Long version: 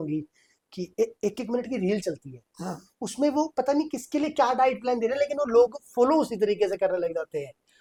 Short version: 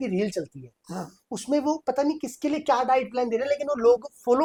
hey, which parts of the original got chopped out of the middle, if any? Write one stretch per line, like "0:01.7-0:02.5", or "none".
none